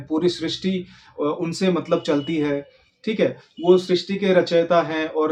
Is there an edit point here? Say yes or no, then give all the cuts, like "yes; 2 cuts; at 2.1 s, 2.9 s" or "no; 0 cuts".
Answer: no; 0 cuts